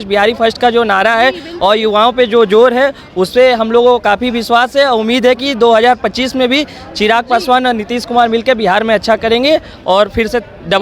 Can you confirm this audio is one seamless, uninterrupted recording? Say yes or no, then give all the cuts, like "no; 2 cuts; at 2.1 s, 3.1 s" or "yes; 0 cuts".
yes; 0 cuts